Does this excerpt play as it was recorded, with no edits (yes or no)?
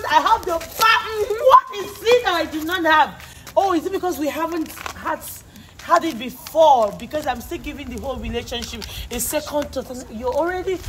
yes